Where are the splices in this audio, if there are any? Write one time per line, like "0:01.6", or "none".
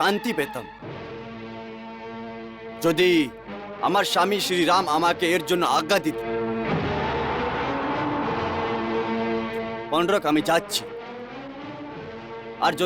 0:09.1